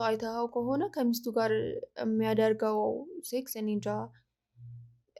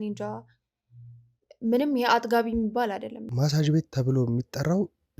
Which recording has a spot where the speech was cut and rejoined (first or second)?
second